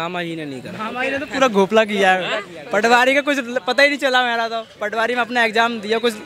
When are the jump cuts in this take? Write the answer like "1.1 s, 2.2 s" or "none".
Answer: none